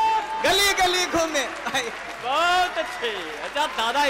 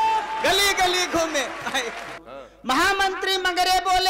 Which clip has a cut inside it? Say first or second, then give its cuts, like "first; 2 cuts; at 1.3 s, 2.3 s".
second; 1 cut; at 2.1 s